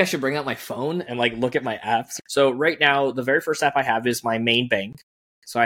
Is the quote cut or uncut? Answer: cut